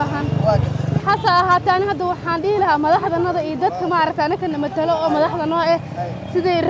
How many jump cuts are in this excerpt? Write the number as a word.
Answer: one